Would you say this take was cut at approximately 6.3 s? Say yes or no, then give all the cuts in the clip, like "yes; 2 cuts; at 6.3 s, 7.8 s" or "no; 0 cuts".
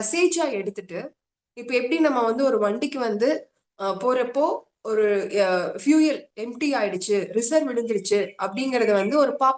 no; 0 cuts